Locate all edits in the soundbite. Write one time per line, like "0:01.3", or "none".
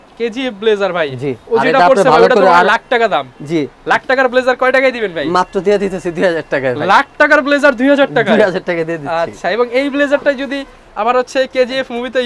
none